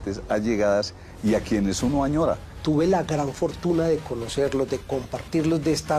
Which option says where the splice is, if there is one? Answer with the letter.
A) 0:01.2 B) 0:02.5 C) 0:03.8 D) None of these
B